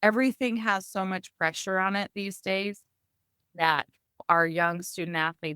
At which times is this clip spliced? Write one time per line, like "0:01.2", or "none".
0:04.2